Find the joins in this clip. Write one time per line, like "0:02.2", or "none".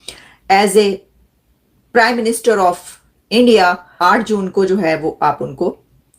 0:03.9